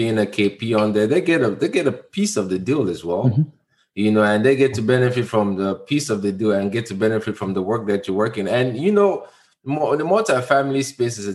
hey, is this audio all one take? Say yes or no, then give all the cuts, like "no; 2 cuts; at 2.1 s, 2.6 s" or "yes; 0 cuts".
yes; 0 cuts